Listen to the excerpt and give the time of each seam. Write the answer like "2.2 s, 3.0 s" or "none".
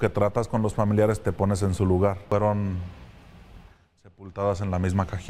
2.3 s